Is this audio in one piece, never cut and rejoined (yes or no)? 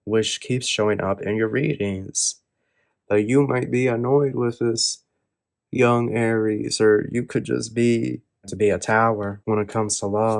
no